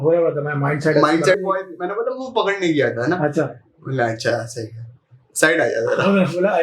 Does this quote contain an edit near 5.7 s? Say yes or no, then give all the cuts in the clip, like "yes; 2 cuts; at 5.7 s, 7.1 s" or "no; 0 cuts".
no; 1 cut; at 1.4 s